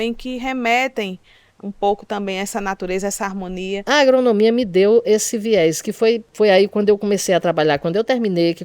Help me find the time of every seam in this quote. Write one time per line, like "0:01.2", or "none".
0:03.8
0:06.3